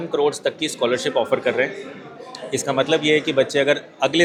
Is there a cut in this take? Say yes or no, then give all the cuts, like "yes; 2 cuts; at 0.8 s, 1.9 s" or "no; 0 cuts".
no; 0 cuts